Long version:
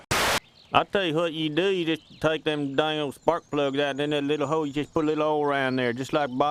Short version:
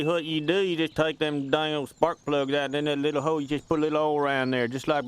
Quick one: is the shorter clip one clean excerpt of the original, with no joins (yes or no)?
no